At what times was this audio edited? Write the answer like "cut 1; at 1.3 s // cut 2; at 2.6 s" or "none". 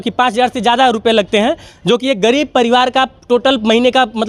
none

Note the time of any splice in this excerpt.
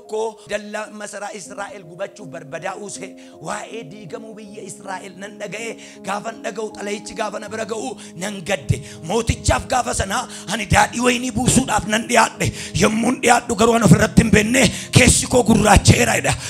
none

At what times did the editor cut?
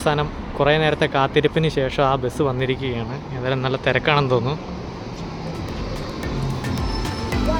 none

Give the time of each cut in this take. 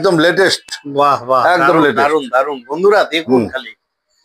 none

